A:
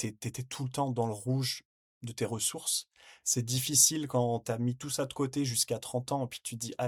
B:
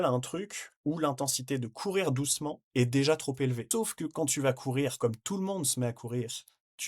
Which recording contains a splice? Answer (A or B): B